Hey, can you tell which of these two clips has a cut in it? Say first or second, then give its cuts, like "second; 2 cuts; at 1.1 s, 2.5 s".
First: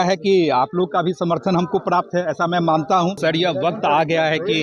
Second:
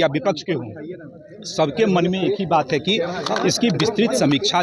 first; 1 cut; at 3.2 s